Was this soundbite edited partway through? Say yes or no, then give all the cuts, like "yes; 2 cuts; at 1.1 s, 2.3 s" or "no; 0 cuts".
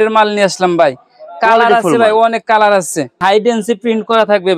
yes; 1 cut; at 3.2 s